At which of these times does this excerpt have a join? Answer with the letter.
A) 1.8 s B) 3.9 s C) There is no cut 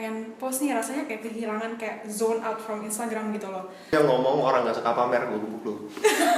B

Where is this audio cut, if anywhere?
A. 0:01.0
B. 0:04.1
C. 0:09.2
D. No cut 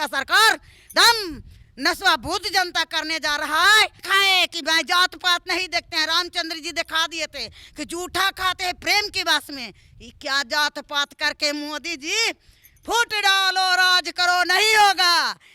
B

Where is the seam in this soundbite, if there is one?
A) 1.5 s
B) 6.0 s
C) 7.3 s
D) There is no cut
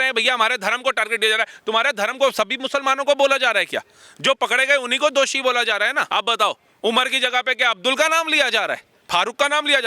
B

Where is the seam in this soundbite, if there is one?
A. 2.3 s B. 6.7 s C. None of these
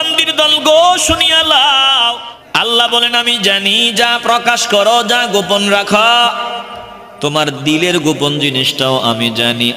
A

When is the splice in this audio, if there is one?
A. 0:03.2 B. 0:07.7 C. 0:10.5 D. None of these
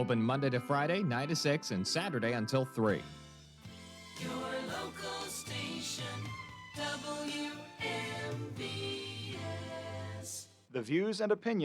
A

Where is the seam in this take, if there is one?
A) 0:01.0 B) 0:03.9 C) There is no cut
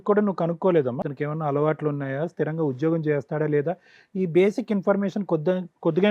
A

